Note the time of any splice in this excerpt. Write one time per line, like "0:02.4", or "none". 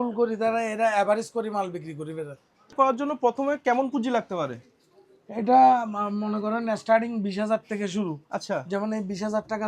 0:02.7

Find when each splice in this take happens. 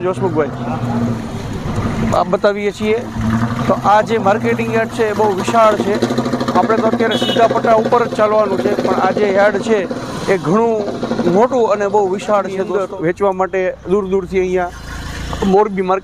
0:12.7

